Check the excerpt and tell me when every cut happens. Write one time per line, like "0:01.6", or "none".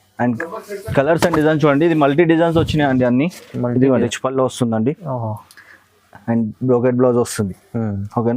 0:04.1